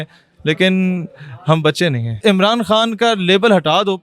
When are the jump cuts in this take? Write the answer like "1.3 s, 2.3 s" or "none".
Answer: 2.1 s